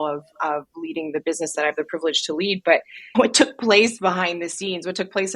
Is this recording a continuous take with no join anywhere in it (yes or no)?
yes